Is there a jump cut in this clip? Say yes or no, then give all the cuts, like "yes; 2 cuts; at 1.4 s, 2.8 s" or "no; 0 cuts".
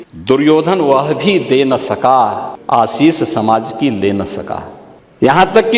no; 0 cuts